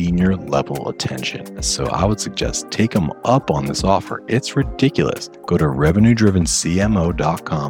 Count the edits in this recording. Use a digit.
2